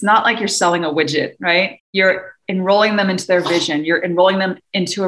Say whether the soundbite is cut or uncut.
cut